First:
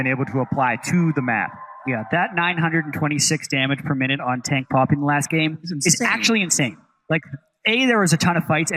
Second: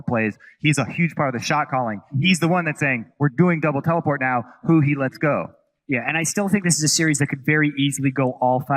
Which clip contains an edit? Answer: second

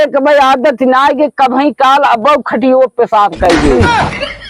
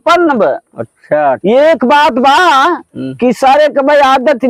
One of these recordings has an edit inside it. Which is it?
first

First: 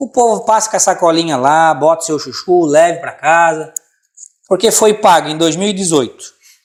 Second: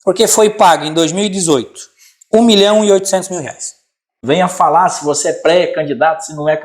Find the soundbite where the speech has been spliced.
second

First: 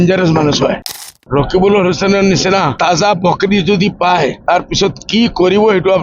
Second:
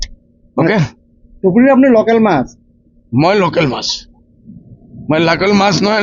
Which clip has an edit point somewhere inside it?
first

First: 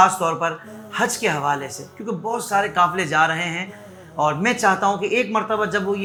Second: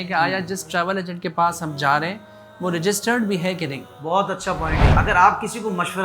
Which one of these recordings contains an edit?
second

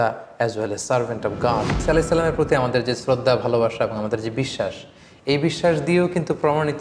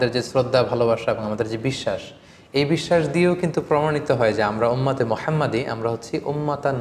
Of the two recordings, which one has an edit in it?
first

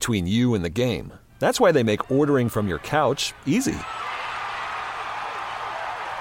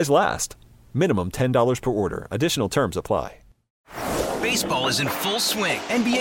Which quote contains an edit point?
second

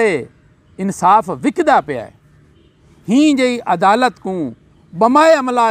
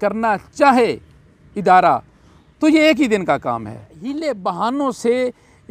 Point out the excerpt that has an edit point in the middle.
second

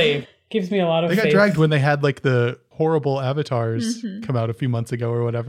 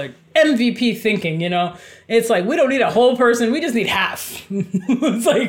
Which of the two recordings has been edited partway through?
first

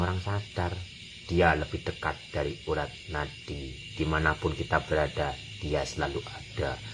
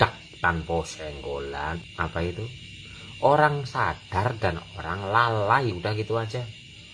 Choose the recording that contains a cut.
second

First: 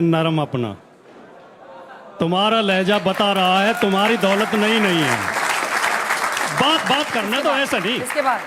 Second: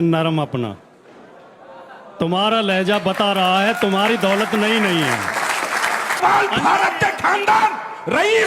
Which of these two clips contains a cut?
second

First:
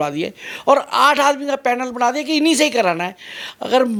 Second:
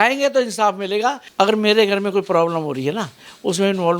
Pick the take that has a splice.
second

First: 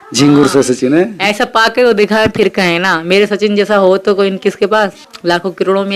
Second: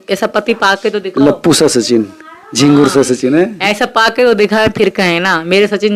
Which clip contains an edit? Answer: first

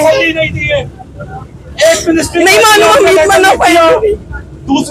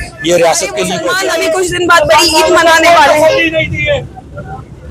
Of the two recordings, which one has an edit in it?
second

